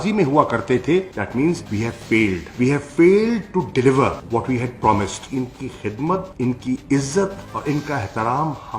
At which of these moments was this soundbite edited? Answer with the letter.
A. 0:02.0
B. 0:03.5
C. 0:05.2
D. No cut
C